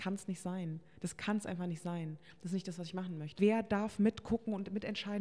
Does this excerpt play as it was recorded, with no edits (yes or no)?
no